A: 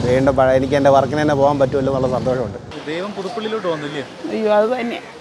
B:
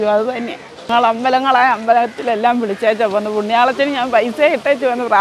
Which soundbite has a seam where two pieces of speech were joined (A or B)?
A